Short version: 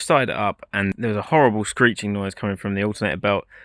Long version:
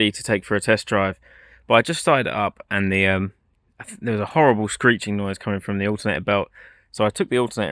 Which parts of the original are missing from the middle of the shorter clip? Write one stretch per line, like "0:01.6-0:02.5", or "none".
0:02.9-0:04.0

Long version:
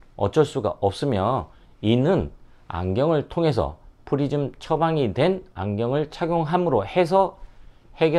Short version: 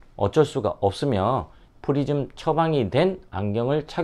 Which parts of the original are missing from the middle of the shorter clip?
0:01.6-0:03.9

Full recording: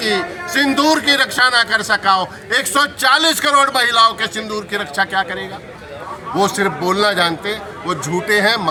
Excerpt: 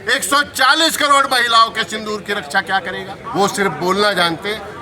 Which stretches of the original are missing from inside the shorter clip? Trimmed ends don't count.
0:05.6-0:06.2

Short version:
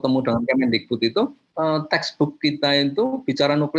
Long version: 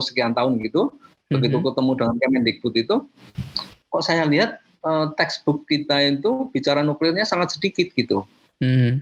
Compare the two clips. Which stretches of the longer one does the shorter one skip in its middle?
0:03.2-0:04.7

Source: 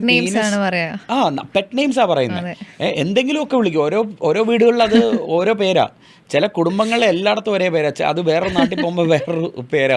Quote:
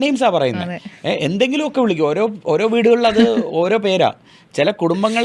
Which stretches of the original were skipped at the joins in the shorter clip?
none

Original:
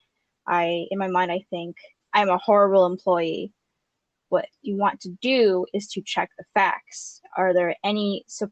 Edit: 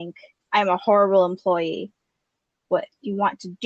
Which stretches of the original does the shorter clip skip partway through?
none

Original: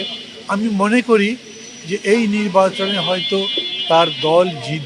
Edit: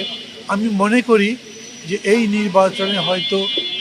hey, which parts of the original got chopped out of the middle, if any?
none

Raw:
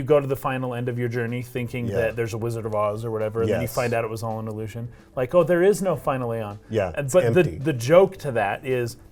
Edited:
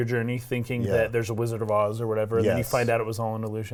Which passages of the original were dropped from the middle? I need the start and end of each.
none

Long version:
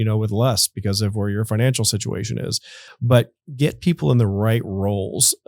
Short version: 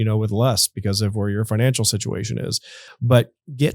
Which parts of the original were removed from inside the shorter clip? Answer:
none

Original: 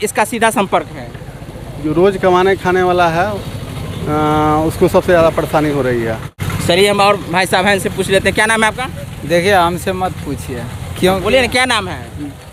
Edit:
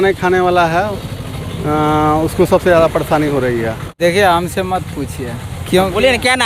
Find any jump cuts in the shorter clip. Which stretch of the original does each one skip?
0:06.2-0:09.1

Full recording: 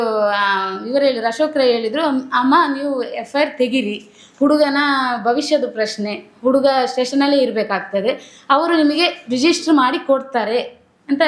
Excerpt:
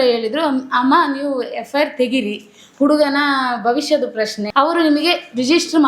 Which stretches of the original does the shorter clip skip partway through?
0:06.0-0:08.3

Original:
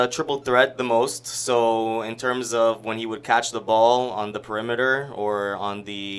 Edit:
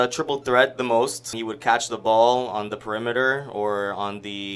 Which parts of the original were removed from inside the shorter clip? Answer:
0:01.3-0:02.9

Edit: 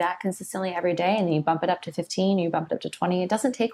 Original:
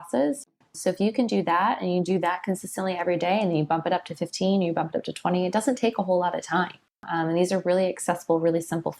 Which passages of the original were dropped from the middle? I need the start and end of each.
none

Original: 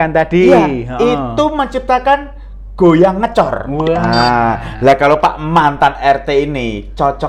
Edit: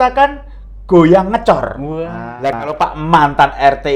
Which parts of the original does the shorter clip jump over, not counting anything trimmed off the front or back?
0:04.0-0:04.5

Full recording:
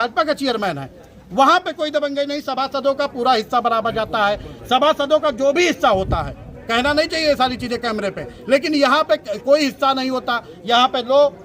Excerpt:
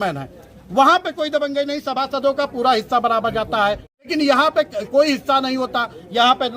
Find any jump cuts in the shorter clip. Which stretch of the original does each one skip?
0:04.7-0:08.6

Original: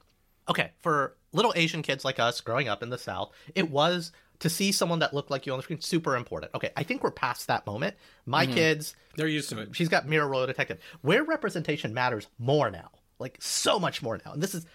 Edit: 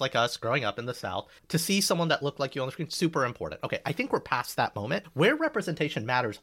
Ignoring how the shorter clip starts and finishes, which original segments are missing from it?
0:03.3-0:04.2
0:08.0-0:10.9

